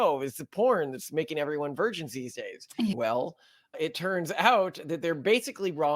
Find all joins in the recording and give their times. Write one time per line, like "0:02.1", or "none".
0:03.0